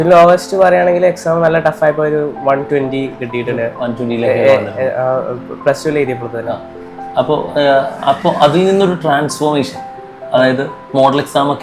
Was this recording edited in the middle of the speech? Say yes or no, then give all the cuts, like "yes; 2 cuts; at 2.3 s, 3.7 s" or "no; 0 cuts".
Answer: no; 0 cuts